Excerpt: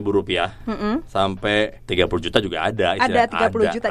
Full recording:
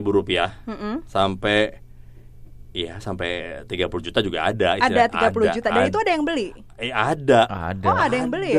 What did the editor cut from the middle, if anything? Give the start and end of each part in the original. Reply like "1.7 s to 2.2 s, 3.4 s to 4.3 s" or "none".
1.8 s to 3.6 s